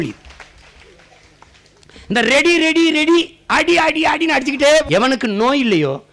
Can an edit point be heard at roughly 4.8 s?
yes; 1 cut; at 4.8 s

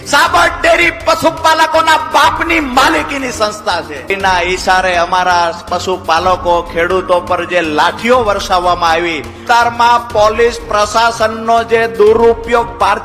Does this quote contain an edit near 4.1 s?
yes; 2 cuts; at 4.1 s, 9.4 s

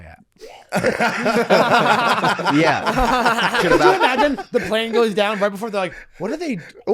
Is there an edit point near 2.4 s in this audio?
no; 1 cut; at 3.6 s

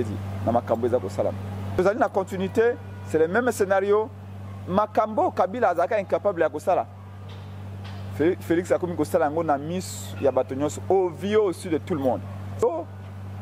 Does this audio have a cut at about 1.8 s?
yes; 2 cuts; at 1.8 s, 12.6 s

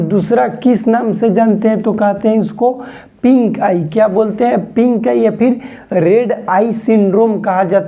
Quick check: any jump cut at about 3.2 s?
no; 0 cuts

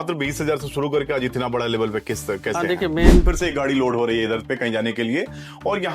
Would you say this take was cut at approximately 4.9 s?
no; 1 cut; at 3.2 s

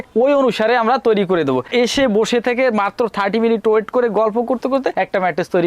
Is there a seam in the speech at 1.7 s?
yes; 1 cut; at 1.7 s

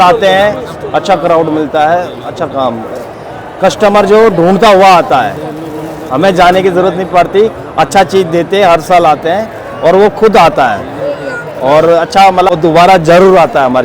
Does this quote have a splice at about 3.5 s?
no; 0 cuts

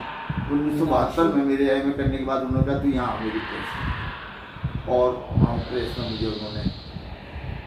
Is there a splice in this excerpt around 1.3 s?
no; 0 cuts

